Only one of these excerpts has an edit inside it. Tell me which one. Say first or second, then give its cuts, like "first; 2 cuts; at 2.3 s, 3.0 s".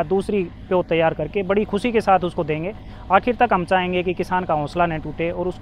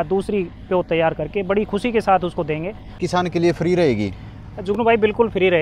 second; 1 cut; at 3.0 s